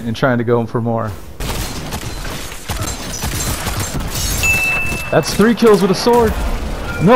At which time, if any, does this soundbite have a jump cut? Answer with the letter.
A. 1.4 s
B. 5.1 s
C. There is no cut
A